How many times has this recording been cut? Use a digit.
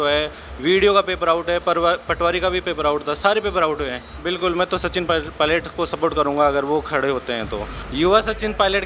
2